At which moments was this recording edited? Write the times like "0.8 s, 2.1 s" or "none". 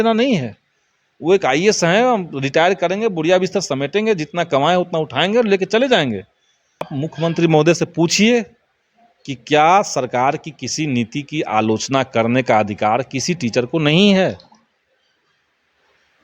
6.9 s